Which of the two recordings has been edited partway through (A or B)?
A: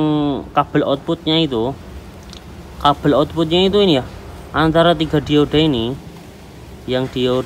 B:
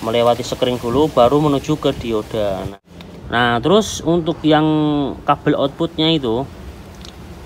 B